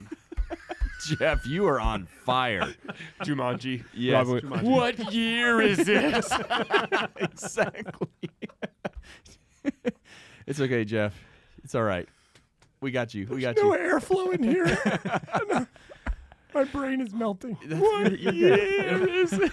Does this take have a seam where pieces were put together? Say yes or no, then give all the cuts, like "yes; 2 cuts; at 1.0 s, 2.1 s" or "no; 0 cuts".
no; 0 cuts